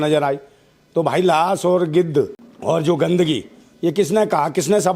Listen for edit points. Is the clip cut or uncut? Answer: cut